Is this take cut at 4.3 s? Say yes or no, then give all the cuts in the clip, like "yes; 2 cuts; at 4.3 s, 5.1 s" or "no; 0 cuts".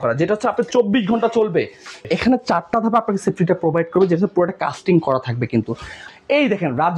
no; 2 cuts; at 2.0 s, 6.0 s